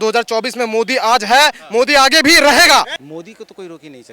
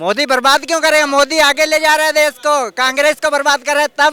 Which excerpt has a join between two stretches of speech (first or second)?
first